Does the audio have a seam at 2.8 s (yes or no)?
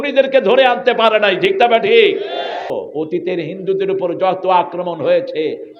yes